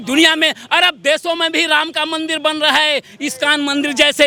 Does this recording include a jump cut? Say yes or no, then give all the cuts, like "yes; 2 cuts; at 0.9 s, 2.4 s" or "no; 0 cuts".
no; 0 cuts